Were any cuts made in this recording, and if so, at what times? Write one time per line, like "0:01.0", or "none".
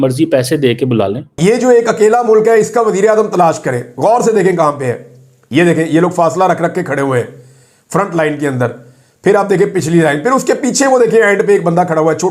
0:01.3